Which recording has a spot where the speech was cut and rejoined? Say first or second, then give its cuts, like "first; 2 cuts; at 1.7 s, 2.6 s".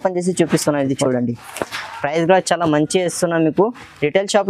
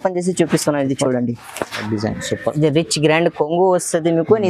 second; 1 cut; at 1.8 s